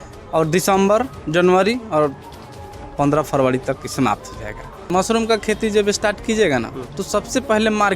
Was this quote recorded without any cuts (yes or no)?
no